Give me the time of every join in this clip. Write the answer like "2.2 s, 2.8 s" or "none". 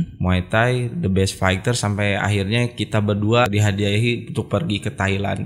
3.5 s